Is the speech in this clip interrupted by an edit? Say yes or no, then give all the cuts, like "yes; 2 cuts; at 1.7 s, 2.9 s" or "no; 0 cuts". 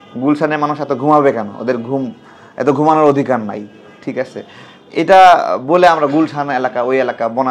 no; 0 cuts